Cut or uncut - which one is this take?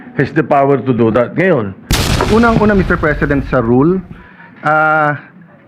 cut